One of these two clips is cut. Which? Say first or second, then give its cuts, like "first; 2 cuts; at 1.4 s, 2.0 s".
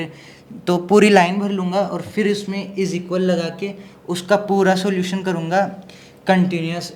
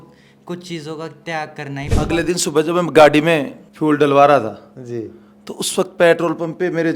second; 1 cut; at 1.8 s